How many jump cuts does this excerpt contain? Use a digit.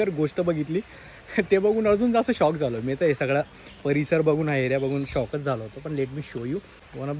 0